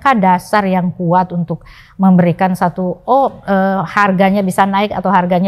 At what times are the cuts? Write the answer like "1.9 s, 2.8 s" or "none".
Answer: none